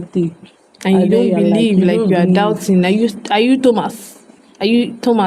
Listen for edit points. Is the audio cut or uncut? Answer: uncut